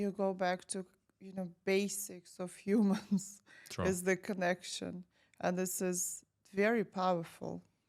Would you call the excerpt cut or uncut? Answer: uncut